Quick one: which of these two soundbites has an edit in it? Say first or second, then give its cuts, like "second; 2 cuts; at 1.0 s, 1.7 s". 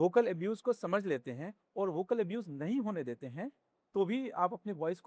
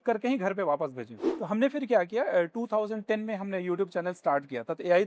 second; 1 cut; at 1.2 s